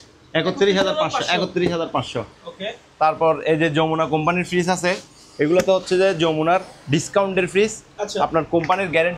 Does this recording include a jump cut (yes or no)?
no